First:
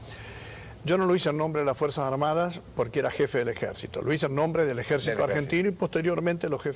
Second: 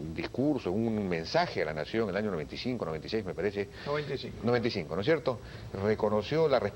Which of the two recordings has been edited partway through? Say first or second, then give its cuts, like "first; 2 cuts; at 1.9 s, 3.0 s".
second; 1 cut; at 2.0 s